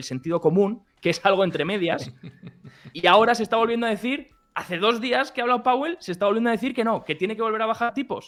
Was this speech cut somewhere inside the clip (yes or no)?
no